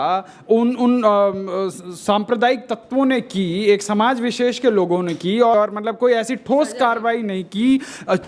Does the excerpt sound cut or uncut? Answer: cut